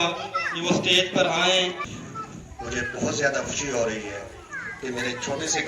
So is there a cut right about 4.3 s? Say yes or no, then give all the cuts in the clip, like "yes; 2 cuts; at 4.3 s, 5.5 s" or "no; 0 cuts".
no; 1 cut; at 1.9 s